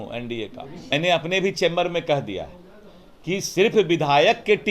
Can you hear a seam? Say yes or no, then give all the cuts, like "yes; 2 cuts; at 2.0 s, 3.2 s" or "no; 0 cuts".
yes; 1 cut; at 0.9 s